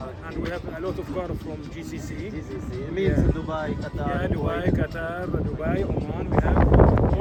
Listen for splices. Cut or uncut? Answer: uncut